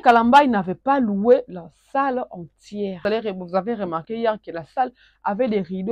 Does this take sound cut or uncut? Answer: cut